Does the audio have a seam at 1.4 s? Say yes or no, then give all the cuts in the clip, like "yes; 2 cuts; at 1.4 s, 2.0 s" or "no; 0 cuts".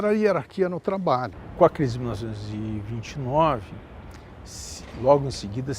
yes; 1 cut; at 1.4 s